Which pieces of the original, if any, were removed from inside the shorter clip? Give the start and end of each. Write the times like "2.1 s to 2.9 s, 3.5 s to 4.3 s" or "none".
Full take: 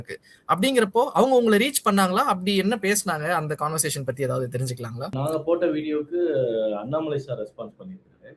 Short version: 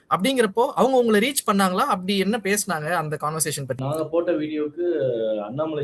4.2 s to 5.1 s